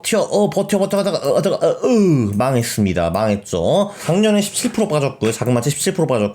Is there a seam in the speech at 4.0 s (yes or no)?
yes